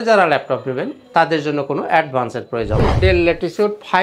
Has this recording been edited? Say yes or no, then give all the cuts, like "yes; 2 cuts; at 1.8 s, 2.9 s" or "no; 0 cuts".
yes; 1 cut; at 2.9 s